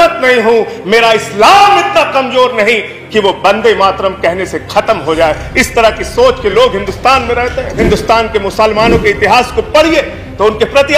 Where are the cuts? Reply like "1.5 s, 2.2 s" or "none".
7.7 s